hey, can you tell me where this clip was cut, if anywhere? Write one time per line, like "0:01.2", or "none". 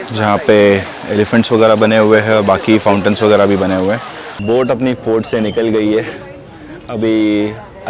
0:04.3